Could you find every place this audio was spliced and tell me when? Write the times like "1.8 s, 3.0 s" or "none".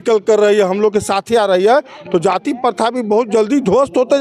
none

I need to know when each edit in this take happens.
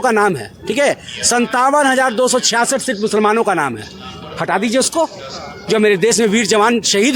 none

